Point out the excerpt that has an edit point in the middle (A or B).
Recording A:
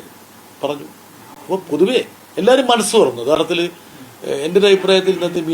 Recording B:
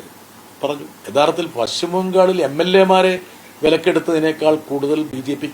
B